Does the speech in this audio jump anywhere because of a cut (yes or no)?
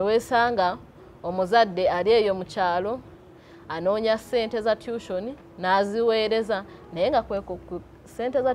no